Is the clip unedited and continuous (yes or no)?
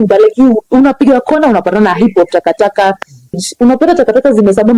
no